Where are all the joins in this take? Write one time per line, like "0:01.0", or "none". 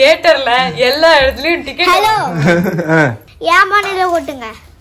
0:03.3